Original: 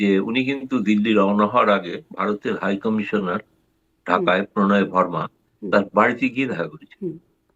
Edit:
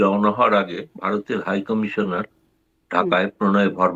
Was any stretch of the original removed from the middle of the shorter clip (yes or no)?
no